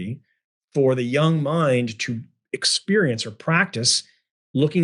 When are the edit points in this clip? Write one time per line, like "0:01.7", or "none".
none